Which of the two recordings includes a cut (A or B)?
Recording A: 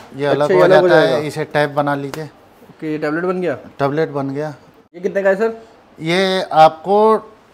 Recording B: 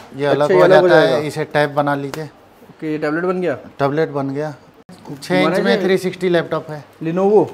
B